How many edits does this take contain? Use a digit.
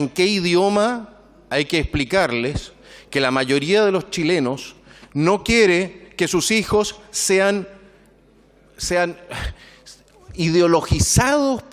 0